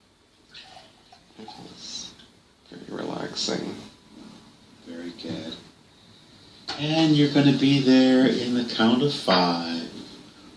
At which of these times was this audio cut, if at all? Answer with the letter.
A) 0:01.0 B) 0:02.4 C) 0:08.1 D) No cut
C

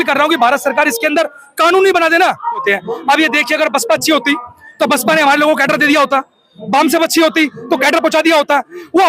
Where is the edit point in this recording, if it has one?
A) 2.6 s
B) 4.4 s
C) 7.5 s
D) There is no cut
A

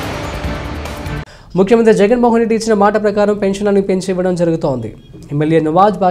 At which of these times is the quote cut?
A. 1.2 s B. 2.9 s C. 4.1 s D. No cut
A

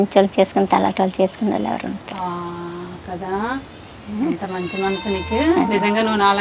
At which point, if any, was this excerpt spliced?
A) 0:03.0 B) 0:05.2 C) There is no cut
C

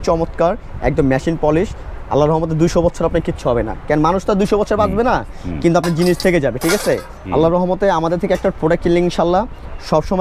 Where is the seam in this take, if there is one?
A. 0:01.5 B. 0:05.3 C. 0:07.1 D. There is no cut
C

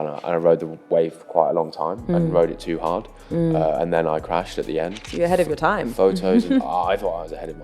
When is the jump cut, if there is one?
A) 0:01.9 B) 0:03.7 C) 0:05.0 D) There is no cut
C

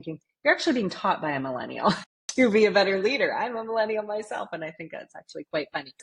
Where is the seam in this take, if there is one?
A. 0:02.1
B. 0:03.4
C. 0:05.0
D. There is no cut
A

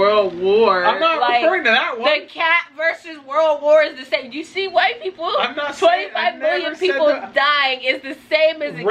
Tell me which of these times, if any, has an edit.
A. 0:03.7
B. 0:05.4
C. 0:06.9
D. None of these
D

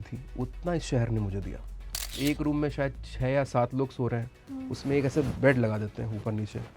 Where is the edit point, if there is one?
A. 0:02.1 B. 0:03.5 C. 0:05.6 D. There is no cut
A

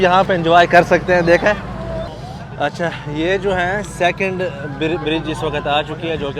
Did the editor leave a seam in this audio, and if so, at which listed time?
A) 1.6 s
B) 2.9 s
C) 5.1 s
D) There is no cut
D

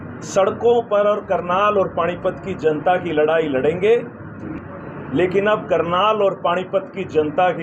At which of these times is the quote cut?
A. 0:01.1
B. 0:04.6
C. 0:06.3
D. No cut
B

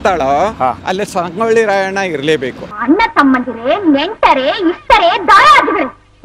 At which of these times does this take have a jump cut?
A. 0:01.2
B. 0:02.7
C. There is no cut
B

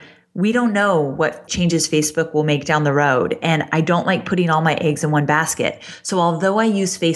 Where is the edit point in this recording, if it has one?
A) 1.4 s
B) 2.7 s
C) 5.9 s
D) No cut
A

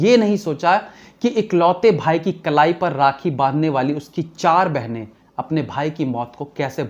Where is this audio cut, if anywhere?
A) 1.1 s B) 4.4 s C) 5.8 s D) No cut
D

